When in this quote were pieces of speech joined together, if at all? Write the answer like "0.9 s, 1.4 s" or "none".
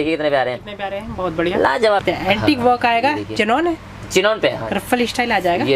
2.0 s